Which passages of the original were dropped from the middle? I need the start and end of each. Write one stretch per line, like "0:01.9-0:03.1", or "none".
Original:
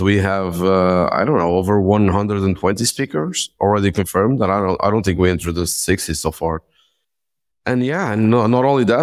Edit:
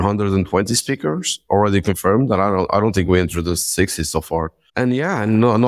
0:06.7-0:07.5